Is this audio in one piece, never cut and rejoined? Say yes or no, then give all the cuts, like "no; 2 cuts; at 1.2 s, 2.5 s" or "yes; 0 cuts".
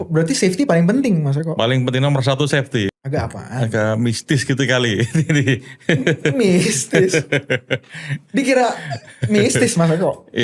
no; 1 cut; at 2.9 s